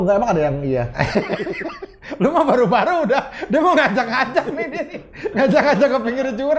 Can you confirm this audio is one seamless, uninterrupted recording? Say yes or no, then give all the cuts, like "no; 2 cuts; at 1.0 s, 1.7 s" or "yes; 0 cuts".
yes; 0 cuts